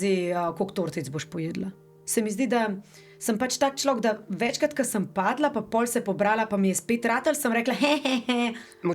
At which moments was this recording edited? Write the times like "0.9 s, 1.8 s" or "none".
1.9 s